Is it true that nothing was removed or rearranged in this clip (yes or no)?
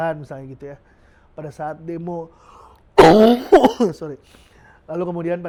yes